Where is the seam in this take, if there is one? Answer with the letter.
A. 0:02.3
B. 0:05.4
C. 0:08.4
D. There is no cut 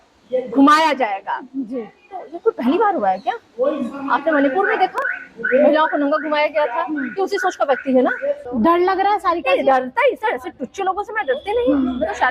C